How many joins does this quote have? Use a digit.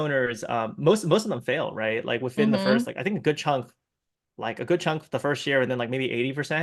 0